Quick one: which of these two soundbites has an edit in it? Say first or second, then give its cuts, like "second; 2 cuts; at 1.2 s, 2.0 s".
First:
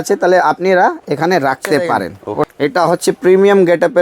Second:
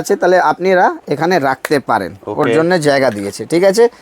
first; 1 cut; at 2.5 s